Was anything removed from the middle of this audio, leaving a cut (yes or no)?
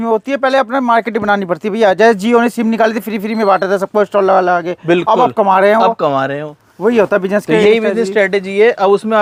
no